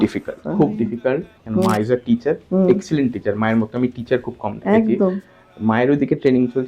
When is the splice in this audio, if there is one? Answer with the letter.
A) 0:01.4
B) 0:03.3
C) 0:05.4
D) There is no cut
A